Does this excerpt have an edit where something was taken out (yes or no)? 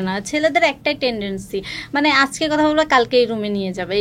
no